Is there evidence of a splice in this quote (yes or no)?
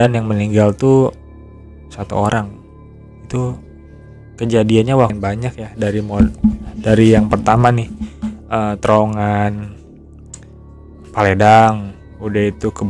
yes